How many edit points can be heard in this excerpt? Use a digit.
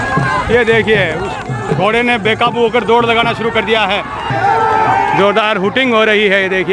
1